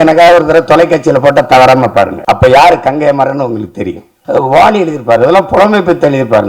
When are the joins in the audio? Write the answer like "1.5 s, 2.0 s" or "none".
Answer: 2.2 s, 4.1 s